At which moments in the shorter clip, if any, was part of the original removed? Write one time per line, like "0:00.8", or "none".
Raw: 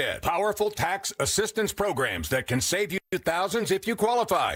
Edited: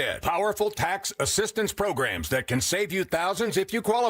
0:02.9